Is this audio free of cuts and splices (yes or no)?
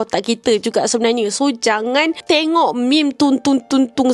no